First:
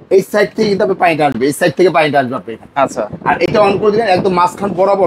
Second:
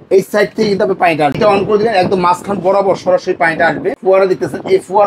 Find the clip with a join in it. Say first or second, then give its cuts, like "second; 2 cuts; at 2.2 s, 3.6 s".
second; 2 cuts; at 1.4 s, 4.0 s